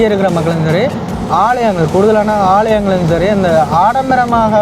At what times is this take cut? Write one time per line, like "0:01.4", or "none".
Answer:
none